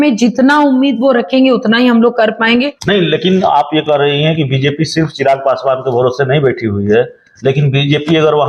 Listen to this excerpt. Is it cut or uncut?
cut